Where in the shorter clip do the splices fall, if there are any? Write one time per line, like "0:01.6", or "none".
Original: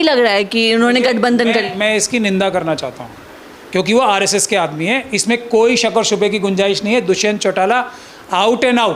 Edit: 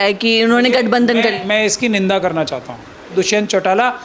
0:03.1